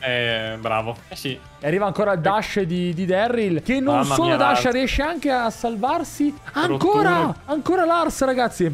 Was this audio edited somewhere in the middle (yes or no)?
yes